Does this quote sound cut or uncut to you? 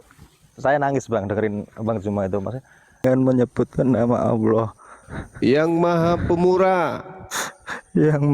cut